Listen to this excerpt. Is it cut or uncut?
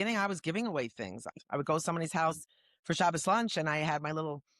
cut